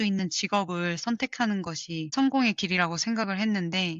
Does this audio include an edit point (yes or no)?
yes